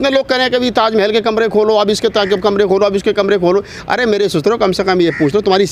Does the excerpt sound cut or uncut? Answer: uncut